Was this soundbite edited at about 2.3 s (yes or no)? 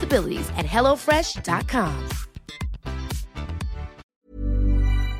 no